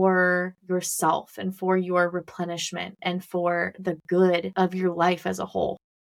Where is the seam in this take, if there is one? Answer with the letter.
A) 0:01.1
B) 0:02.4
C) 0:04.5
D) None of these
C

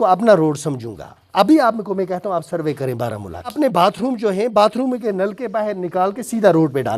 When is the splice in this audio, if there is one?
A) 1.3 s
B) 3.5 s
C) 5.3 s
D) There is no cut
B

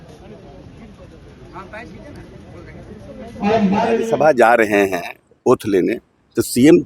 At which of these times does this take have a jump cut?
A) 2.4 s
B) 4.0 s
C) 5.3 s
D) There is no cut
B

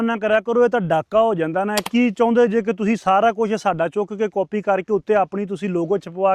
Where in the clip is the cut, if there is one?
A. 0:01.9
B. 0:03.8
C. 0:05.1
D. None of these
A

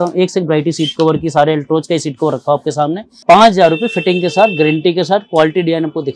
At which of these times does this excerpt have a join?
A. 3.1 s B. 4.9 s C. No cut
A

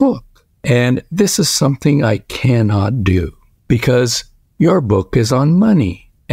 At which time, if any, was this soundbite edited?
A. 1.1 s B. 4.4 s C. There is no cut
C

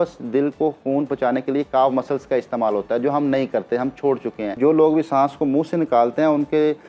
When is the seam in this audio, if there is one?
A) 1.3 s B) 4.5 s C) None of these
B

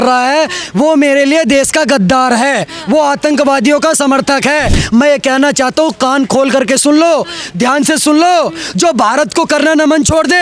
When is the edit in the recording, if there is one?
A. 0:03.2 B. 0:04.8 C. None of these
B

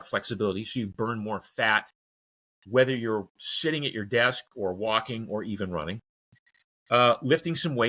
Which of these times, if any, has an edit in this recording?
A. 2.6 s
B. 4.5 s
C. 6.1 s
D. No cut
D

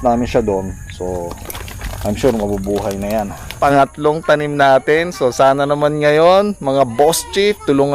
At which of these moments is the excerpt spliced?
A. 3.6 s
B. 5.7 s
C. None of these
A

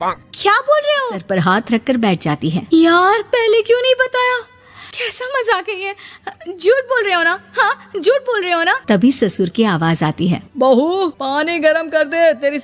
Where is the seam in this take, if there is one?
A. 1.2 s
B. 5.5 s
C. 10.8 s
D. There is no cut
A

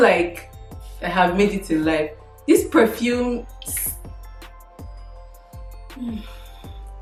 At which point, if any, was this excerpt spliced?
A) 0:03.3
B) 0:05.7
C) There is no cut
C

